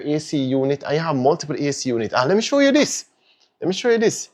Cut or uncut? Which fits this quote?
uncut